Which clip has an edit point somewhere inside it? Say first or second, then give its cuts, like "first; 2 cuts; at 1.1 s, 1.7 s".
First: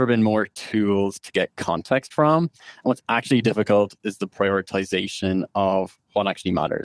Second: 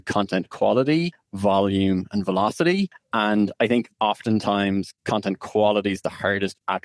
second; 2 cuts; at 1.2 s, 3.0 s